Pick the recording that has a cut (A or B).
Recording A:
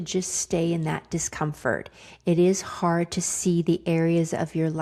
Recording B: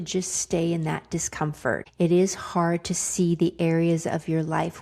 B